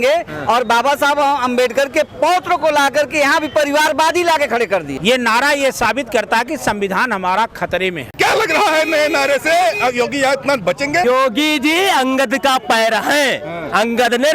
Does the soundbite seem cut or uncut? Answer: cut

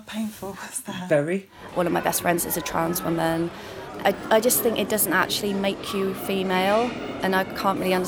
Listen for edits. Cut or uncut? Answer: cut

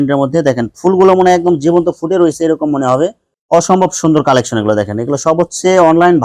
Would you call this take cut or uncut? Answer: cut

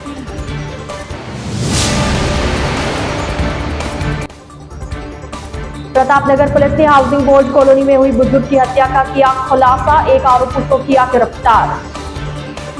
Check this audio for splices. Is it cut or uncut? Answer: uncut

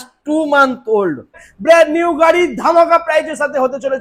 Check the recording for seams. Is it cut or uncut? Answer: cut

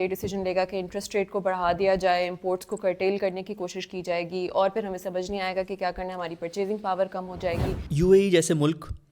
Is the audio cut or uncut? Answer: cut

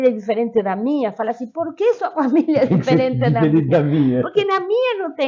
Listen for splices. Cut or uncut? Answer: uncut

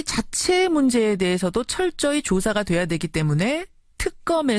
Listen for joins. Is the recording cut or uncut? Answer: cut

